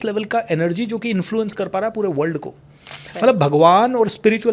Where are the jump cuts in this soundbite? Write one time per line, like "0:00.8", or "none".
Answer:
none